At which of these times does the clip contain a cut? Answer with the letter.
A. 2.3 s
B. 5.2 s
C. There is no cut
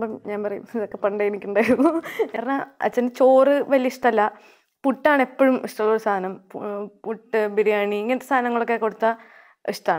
A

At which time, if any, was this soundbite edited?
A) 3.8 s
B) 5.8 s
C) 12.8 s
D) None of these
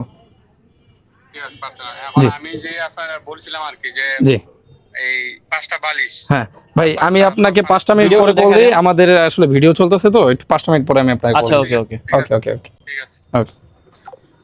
D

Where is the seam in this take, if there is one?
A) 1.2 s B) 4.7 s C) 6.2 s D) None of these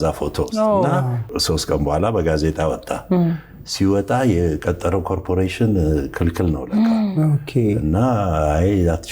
A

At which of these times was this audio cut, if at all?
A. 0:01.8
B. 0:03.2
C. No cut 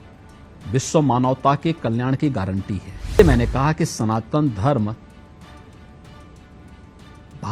B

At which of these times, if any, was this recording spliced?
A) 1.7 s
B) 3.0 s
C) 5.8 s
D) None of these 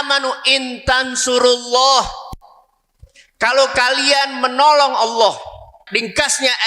C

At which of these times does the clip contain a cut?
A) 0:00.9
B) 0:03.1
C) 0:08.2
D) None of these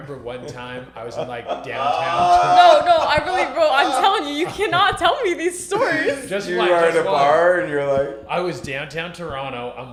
D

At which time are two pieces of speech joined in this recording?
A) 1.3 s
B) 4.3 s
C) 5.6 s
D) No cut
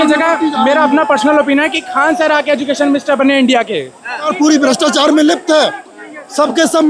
B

